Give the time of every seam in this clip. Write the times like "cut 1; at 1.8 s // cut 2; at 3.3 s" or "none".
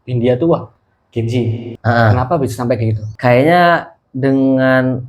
cut 1; at 3.1 s